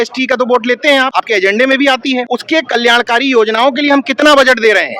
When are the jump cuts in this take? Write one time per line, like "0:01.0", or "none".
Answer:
0:01.1
0:02.3